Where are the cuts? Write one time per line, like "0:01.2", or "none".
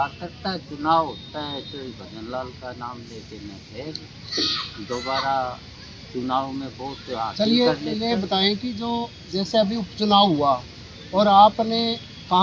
none

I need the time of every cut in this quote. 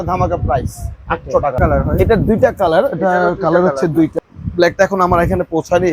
0:01.6
0:04.2

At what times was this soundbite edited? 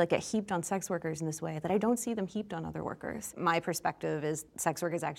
0:03.3

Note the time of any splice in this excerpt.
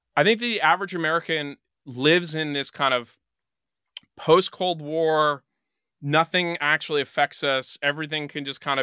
none

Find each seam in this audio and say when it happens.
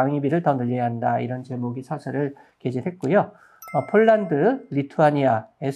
none

